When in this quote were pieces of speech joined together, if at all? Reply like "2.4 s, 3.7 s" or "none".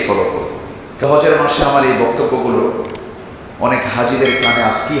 1.0 s